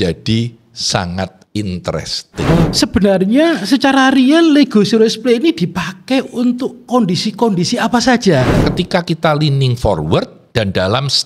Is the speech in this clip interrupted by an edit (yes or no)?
yes